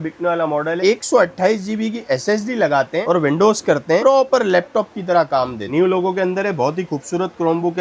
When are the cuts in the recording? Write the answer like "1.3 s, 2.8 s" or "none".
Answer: 0.8 s, 3.0 s, 4.0 s, 5.6 s